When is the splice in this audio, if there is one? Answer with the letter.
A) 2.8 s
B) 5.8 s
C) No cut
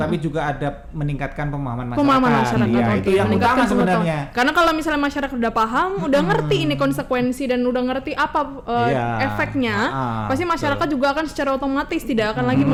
C